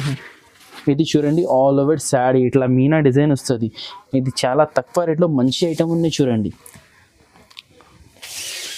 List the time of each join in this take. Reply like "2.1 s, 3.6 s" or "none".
none